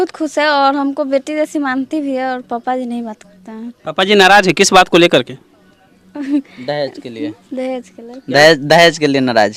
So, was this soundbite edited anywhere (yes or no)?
no